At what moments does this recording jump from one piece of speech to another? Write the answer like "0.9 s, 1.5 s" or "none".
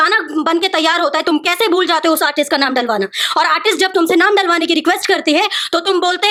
none